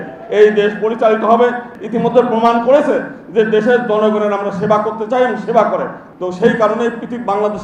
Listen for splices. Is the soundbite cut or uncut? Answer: cut